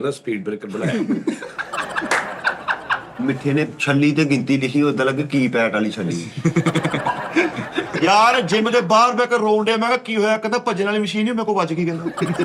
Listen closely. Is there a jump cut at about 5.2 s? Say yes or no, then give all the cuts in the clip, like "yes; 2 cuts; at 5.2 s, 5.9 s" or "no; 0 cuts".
no; 2 cuts; at 3.1 s, 7.9 s